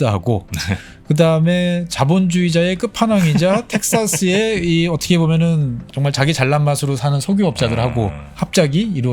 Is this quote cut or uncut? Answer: cut